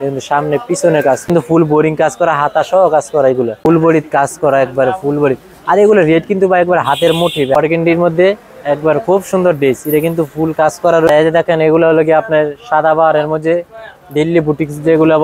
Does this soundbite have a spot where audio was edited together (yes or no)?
yes